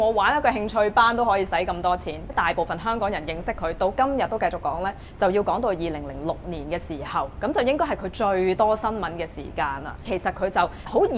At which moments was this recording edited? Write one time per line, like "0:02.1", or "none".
0:02.3
0:10.1

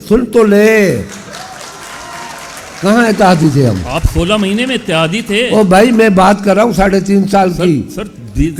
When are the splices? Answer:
none

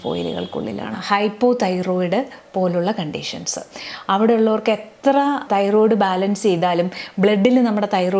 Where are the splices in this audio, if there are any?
0:01.0
0:05.4

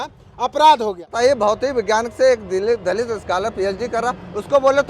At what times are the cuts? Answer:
0:01.1

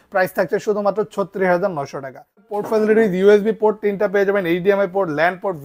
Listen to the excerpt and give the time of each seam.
0:02.5

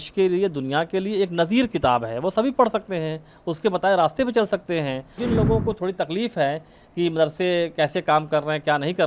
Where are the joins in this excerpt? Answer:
0:05.2

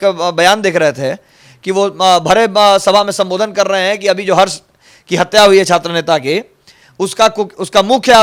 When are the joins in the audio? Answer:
none

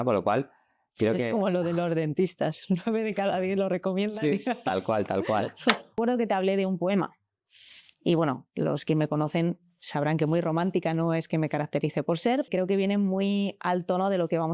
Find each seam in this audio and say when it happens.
0:06.0
0:12.5

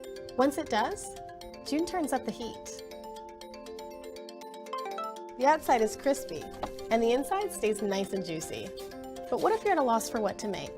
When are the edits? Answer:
0:02.1

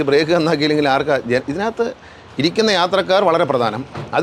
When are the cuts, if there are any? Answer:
none

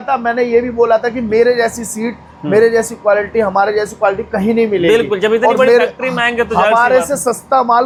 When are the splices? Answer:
none

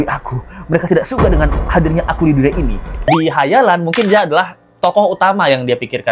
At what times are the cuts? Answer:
0:03.1

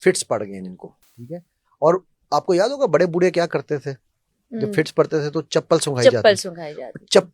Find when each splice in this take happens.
none

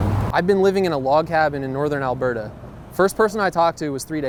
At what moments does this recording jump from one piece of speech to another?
none

